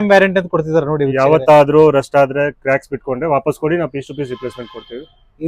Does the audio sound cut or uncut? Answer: uncut